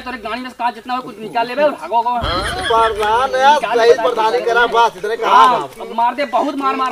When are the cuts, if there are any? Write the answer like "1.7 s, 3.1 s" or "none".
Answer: none